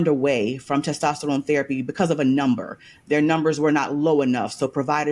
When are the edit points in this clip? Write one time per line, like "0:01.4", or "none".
none